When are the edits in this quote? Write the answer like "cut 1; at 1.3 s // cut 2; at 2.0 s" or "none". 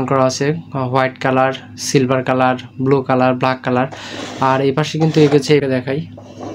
cut 1; at 5.6 s